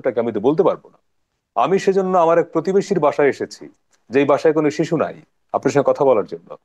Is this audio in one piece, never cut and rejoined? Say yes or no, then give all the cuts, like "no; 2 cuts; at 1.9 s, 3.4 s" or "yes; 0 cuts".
yes; 0 cuts